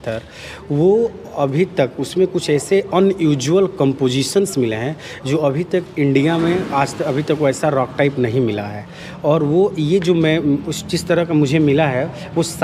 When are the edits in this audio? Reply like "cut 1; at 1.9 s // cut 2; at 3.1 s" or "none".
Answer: none